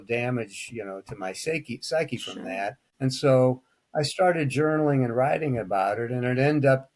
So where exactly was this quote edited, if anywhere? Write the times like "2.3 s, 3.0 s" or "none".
2.8 s